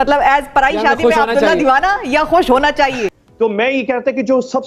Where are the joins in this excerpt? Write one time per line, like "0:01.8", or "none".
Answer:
0:03.1